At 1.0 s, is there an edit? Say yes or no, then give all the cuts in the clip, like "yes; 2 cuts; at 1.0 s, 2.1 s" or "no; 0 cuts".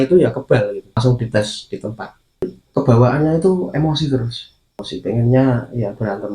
yes; 3 cuts; at 1.0 s, 2.6 s, 4.9 s